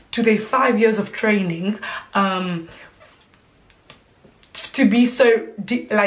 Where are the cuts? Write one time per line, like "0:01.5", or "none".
none